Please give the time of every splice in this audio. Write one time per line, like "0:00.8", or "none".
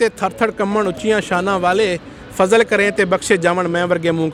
none